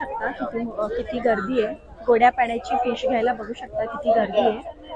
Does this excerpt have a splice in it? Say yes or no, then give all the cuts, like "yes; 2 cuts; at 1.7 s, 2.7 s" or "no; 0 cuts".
no; 0 cuts